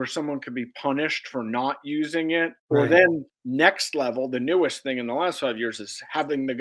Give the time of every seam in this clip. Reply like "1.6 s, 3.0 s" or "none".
2.6 s, 3.3 s